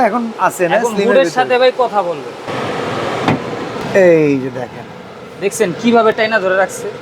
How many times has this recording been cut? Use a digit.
2